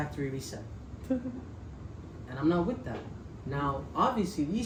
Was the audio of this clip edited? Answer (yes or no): no